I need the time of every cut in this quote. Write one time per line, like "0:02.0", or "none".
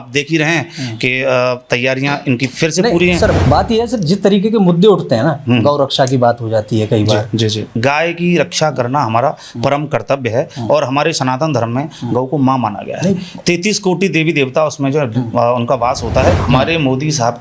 0:03.4
0:07.7
0:16.4